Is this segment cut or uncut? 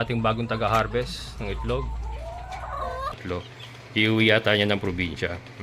cut